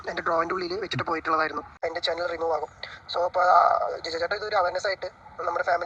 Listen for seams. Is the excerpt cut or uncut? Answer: cut